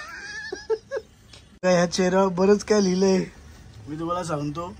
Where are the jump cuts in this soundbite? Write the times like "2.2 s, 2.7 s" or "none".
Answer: 1.6 s